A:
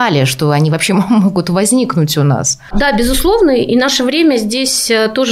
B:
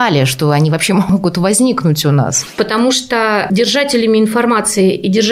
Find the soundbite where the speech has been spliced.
B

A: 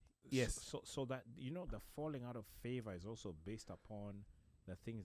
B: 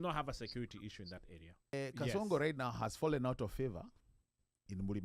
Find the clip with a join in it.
B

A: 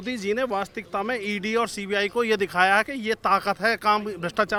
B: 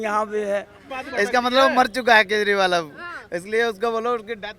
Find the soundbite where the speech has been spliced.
B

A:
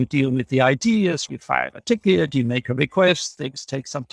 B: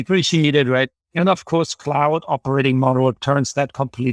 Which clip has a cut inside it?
B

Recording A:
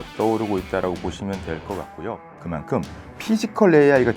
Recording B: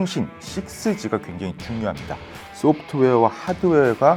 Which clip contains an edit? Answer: A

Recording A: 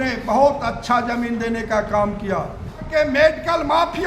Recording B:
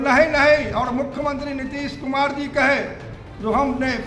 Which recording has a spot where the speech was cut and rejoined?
A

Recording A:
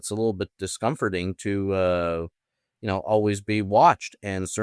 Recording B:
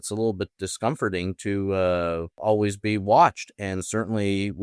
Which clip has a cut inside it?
B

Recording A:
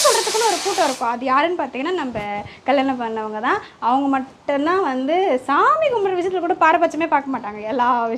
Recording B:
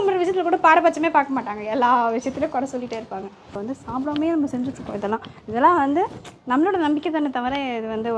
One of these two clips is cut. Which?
B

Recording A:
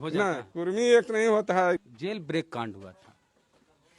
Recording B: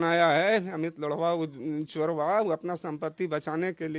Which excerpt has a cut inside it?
A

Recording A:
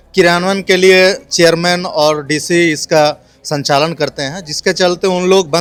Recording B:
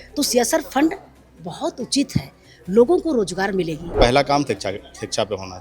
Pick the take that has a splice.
B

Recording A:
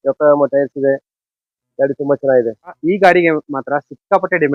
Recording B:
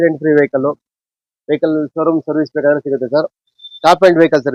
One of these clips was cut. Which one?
A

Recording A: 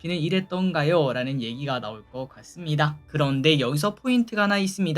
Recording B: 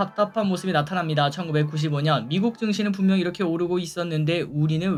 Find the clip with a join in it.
A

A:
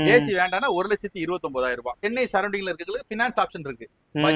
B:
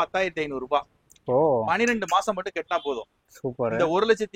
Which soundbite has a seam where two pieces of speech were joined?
A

